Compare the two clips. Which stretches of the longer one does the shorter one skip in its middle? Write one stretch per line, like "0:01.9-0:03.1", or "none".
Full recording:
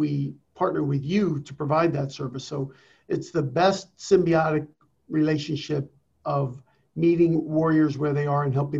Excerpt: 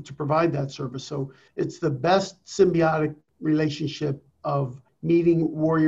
0:02.8-0:02.9
0:04.8-0:04.9
0:06.2-0:06.5